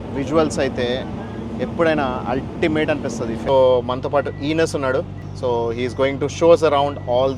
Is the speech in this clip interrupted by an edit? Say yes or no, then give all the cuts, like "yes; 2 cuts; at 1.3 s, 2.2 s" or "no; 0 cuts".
yes; 2 cuts; at 3.4 s, 5.2 s